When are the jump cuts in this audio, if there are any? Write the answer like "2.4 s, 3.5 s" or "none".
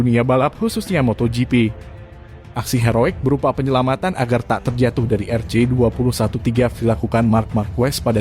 2.4 s